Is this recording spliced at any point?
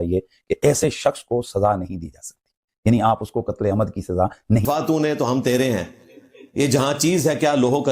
yes; 1 cut; at 4.6 s

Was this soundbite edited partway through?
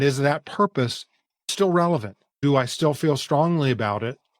yes; 2 cuts; at 1.5 s, 2.4 s

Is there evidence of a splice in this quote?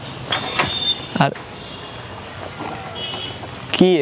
no; 0 cuts

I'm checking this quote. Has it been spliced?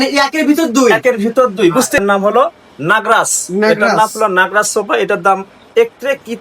yes; 1 cut; at 2.0 s

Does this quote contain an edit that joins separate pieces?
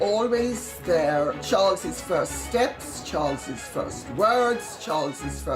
yes; 1 cut; at 1.4 s

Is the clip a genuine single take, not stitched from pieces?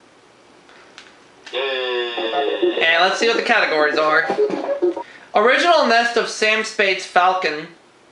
yes; 0 cuts

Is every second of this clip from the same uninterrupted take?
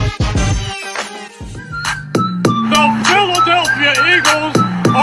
no; 1 cut; at 1.4 s

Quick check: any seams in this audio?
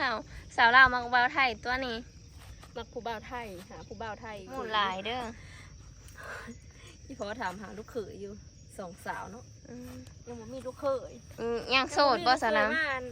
yes; 1 cut; at 4.5 s

